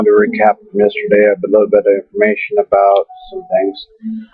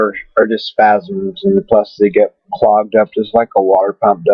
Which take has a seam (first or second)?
second